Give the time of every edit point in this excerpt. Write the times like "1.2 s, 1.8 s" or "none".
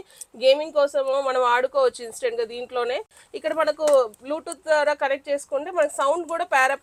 none

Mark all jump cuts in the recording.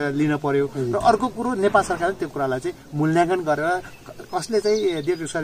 none

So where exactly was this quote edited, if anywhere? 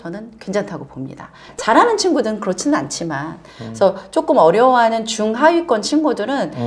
1.5 s

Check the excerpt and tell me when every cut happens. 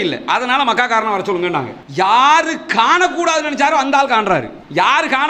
1.8 s

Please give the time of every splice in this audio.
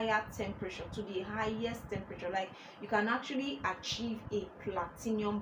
none

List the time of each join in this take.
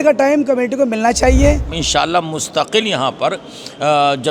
1.8 s

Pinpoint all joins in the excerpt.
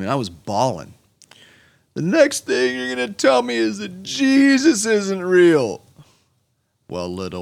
none

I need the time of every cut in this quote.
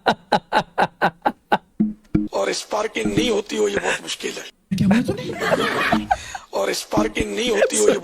2.3 s

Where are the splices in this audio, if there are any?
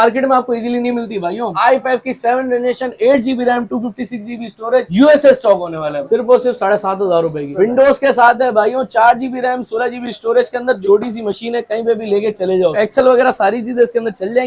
1.5 s, 6.0 s, 7.5 s, 12.7 s

